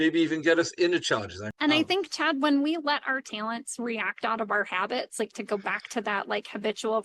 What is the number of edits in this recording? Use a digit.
1